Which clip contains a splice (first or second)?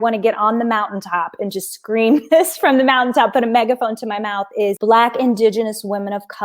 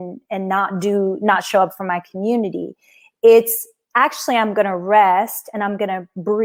first